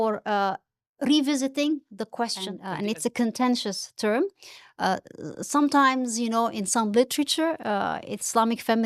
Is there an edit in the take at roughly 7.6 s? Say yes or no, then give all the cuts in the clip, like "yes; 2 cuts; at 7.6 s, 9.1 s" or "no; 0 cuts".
no; 1 cut; at 2.6 s